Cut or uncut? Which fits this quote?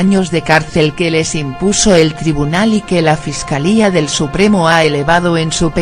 cut